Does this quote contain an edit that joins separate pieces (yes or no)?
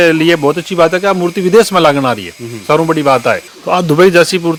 no